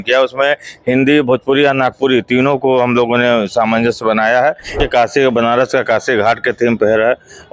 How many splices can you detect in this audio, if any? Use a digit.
1